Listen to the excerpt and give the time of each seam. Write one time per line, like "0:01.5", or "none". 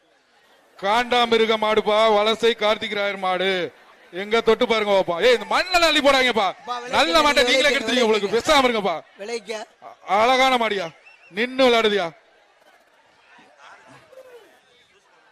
none